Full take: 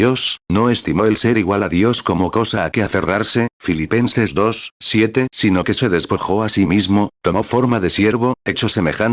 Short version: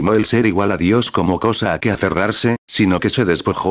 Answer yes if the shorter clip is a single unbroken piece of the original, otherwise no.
no